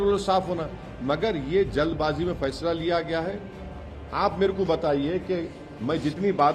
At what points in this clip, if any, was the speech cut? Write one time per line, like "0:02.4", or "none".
0:03.7